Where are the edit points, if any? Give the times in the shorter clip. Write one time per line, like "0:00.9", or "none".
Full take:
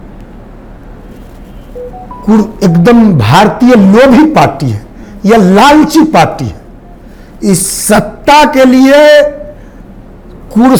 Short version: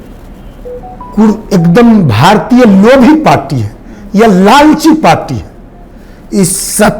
none

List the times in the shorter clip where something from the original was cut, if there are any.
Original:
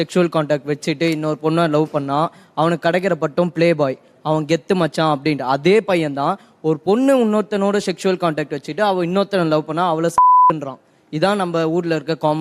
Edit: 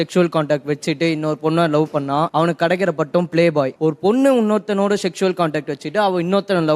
0:02.3
0:03.7

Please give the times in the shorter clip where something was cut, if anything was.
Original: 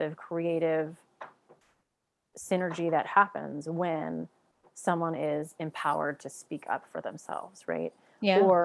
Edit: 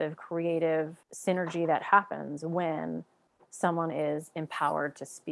0:01.0

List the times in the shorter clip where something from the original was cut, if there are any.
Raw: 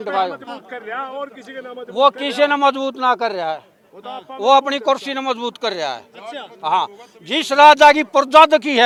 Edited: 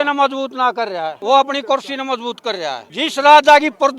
0:01.1
0:02.9

